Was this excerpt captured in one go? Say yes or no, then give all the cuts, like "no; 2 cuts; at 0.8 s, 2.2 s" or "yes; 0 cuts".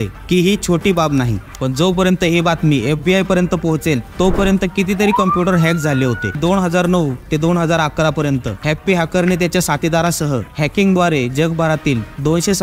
no; 2 cuts; at 1.4 s, 6.4 s